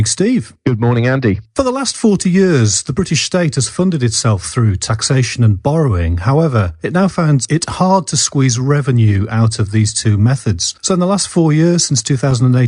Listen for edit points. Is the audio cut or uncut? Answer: cut